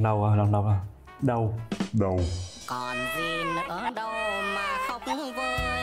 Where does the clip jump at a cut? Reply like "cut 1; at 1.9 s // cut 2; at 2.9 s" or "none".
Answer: none